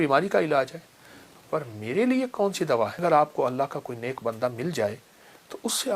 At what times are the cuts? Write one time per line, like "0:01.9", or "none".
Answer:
0:03.0